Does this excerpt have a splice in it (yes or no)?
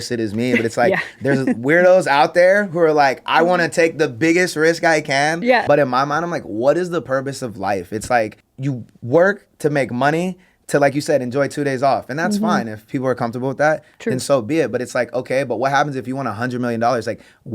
yes